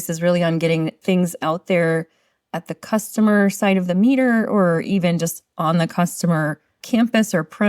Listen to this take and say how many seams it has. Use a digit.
2